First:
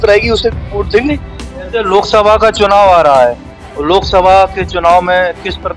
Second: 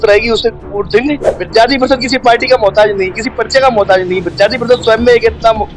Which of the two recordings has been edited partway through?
second; 1 cut; at 1.3 s

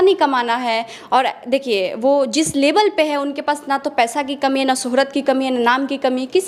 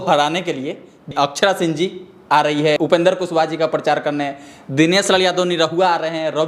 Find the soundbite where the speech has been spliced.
second; 2 cuts; at 1.1 s, 2.8 s

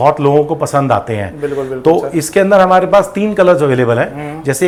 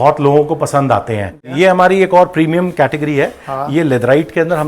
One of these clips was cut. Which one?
second; 1 cut; at 1.4 s

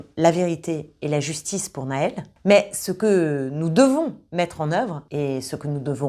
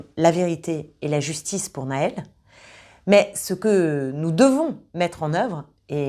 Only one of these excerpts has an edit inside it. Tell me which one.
first; 2 cuts; at 2.3 s, 5.0 s

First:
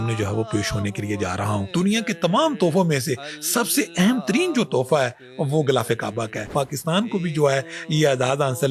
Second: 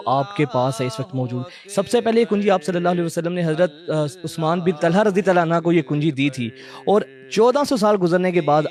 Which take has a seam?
first; 2 cuts; at 1.7 s, 6.5 s

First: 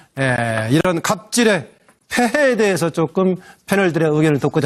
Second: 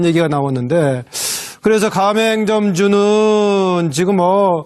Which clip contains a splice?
second; 1 cut; at 2.0 s

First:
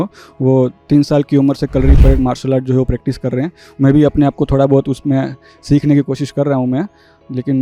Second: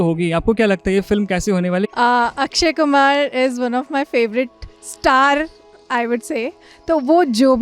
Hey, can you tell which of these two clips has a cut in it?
second; 1 cut; at 1.9 s

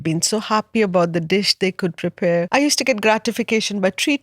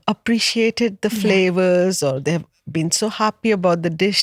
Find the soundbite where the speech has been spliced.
first; 1 cut; at 2.5 s

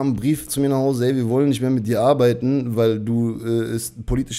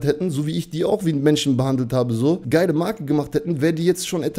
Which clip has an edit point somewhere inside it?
second; 1 cut; at 2.4 s

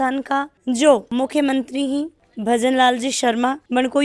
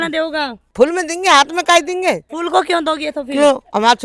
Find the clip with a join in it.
second; 1 cut; at 2.3 s

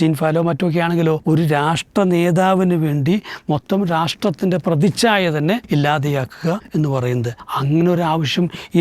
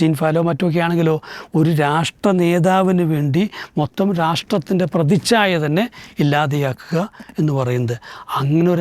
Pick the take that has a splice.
first; 4 cuts; at 1.2 s, 5.6 s, 6.6 s, 7.4 s

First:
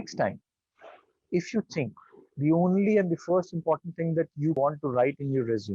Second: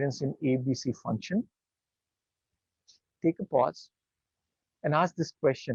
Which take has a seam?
first; 1 cut; at 4.6 s

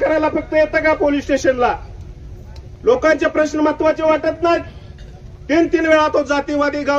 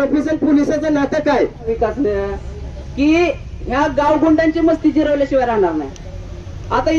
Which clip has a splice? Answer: second; 1 cut; at 1.7 s

